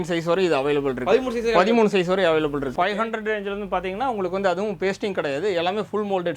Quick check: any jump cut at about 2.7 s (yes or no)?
yes